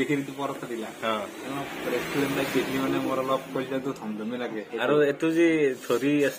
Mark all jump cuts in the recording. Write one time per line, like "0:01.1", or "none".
0:04.7